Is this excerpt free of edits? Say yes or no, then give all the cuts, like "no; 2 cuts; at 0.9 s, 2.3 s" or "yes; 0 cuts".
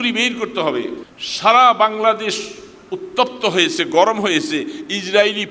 no; 1 cut; at 1.1 s